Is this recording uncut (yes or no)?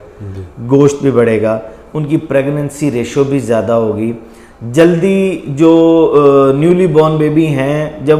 yes